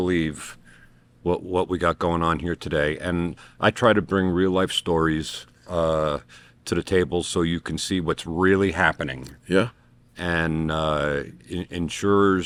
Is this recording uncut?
yes; 0 cuts

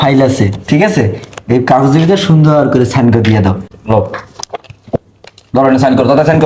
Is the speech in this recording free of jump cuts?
no; 1 cut; at 3.7 s

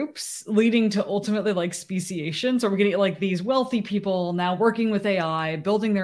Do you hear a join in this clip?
no; 0 cuts

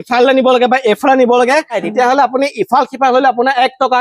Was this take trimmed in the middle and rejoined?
yes; 1 cut; at 1.8 s

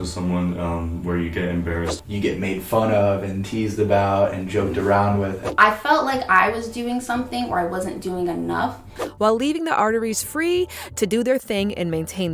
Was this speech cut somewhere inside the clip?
yes; 3 cuts; at 1.9 s, 5.4 s, 9.0 s

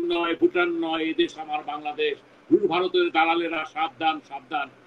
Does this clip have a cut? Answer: no; 0 cuts

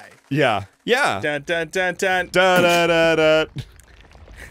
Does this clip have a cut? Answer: yes; 1 cut; at 2.3 s

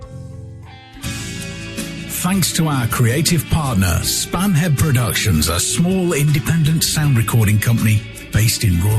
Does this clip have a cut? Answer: yes; 1 cut; at 1.2 s

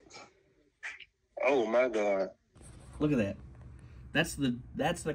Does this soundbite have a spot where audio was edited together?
yes; 1 cut; at 2.5 s

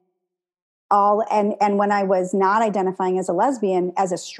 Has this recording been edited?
no; 0 cuts

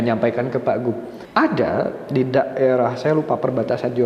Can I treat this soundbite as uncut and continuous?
no; 1 cut; at 1.1 s

